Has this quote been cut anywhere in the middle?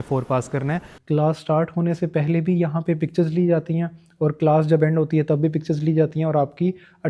yes; 1 cut; at 0.9 s

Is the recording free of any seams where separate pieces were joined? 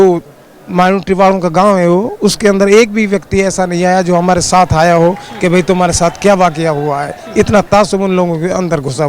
yes; 0 cuts

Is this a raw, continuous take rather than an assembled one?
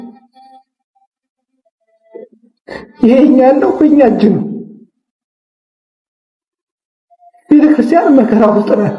yes; 0 cuts

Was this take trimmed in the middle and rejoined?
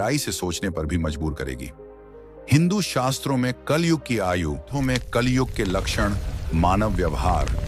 yes; 1 cut; at 4.7 s

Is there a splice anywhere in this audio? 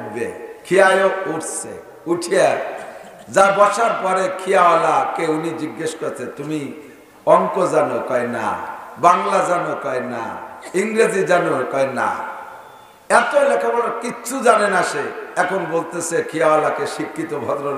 no; 0 cuts

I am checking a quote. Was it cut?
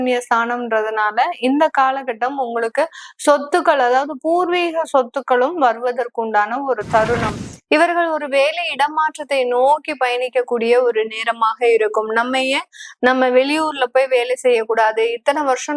yes; 1 cut; at 7.3 s

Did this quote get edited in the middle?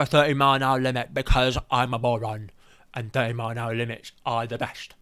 no; 0 cuts

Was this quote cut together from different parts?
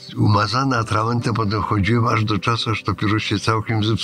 no; 0 cuts

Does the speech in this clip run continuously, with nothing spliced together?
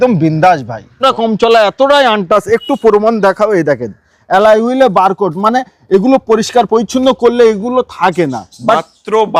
no; 1 cut; at 1.0 s

